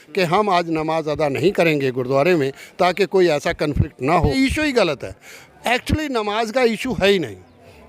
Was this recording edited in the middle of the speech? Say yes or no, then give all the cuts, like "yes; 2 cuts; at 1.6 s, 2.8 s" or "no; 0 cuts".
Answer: yes; 1 cut; at 4.3 s